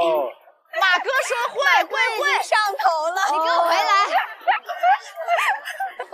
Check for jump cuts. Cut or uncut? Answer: uncut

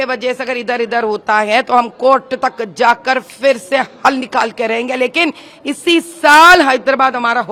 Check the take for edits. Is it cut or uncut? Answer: uncut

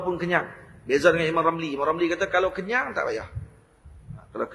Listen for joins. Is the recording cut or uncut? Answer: uncut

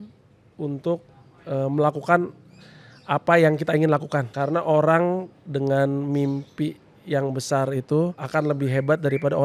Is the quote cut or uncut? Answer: cut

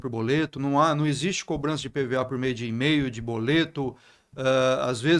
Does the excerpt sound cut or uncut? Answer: uncut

